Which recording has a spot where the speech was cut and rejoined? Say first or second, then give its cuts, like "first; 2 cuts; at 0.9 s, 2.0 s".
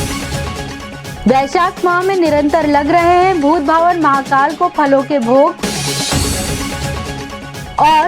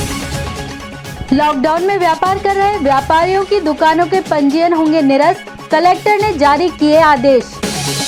first; 1 cut; at 1.0 s